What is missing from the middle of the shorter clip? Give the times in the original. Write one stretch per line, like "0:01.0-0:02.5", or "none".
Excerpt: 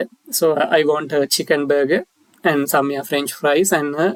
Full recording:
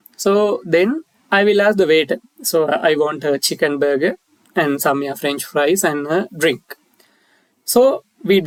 none